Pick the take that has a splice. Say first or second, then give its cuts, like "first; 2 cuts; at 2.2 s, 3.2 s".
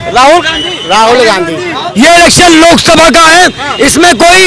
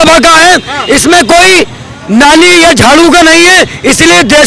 first; 1 cut; at 1.8 s